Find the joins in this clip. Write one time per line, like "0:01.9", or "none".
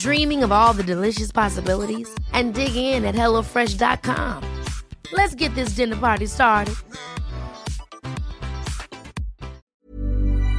0:09.7

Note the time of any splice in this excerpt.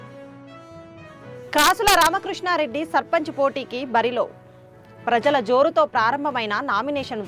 0:01.1

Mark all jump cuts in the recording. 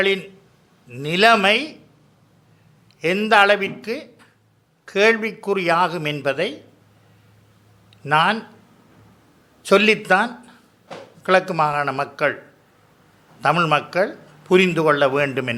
none

